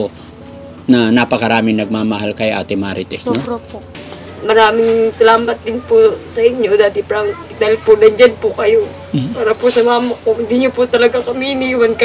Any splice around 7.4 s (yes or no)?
no